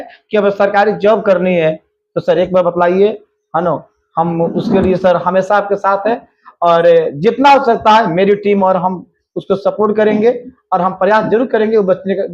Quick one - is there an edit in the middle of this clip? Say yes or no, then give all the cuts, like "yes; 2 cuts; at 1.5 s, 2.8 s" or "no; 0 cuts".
no; 0 cuts